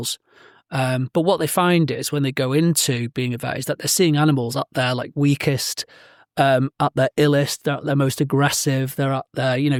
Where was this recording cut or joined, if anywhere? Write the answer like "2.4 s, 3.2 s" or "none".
none